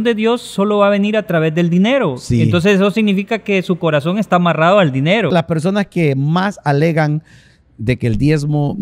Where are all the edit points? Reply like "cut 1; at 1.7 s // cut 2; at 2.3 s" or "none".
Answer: cut 1; at 5.3 s